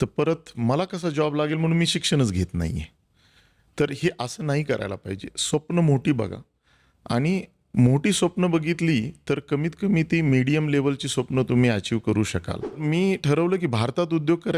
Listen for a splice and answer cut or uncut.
cut